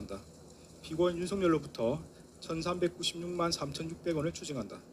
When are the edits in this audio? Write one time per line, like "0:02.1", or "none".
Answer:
none